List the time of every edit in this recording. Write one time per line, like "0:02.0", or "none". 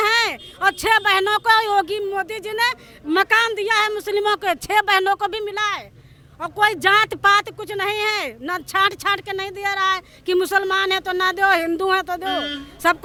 none